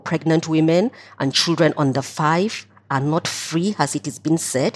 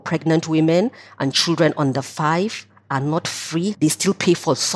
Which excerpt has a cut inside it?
second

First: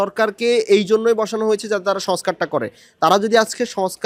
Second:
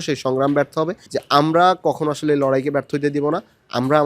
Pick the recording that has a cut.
second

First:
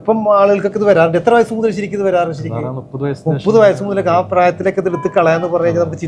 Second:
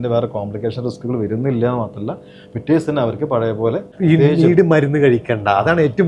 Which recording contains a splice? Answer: second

